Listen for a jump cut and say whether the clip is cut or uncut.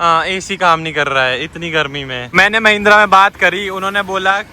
cut